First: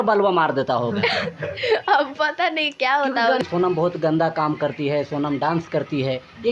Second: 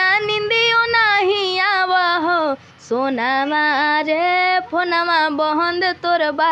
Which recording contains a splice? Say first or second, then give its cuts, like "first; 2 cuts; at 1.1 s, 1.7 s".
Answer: first; 1 cut; at 3.4 s